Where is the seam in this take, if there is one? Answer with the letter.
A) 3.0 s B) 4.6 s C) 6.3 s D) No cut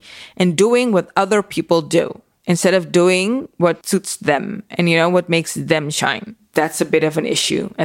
C